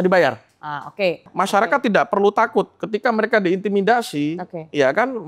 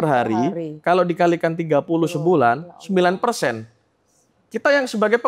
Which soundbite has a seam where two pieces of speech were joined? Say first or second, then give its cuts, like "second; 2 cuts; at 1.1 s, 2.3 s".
first; 1 cut; at 1.2 s